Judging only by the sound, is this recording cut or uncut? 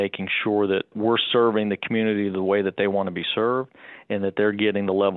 cut